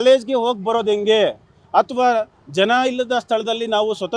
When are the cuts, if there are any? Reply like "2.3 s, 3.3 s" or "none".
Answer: none